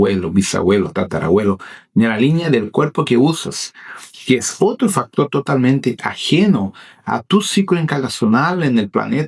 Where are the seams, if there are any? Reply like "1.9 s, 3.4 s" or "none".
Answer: none

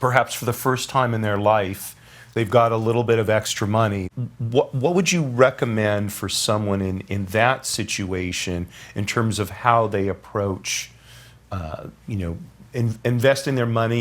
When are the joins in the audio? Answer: 4.1 s

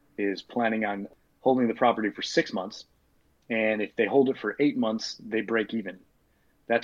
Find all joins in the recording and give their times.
1.1 s

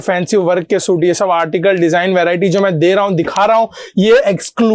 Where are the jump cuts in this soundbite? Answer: none

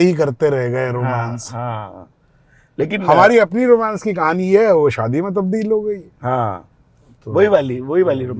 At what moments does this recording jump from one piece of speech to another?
none

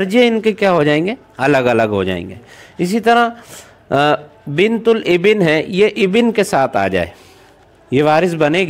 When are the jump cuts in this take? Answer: none

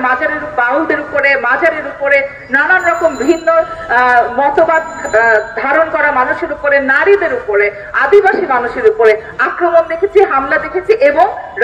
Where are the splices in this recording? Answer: none

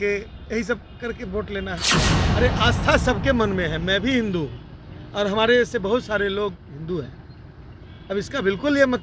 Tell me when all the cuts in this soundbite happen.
2.2 s

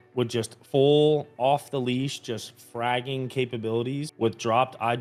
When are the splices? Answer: none

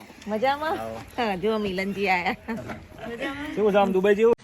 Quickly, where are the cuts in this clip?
none

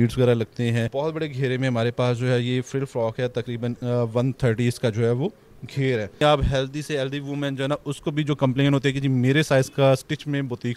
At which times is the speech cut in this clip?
0.8 s, 6.2 s

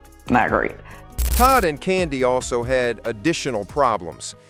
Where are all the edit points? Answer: none

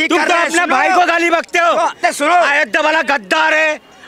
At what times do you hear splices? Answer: 2.0 s

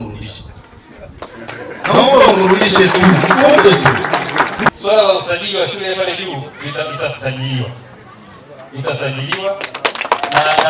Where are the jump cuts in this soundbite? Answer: 4.8 s

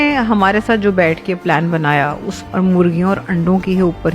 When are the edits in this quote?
2.3 s

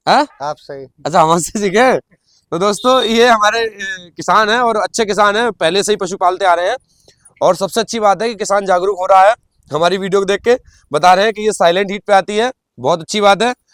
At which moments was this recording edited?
none

